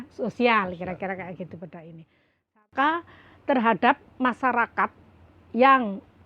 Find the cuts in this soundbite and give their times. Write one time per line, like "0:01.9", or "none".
0:02.6